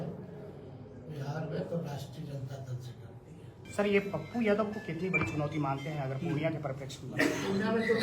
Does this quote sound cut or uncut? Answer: cut